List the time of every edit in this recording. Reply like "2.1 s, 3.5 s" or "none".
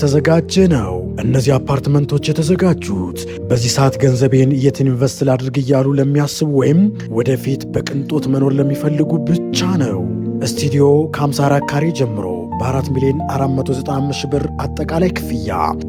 none